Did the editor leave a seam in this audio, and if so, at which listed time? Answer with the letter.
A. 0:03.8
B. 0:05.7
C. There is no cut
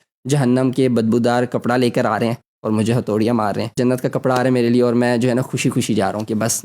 A